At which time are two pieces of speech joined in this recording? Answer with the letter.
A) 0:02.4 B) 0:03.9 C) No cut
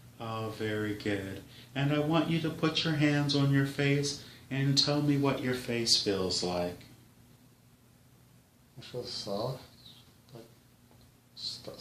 A